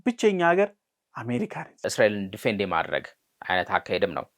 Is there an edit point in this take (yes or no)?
yes